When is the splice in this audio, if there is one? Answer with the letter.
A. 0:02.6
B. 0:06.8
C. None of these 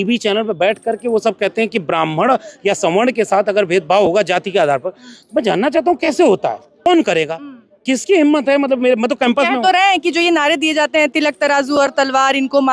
B